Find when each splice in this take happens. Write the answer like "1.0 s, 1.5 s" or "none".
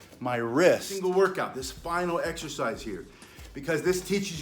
0.9 s